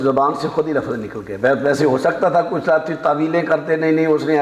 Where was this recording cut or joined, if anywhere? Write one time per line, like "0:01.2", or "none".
none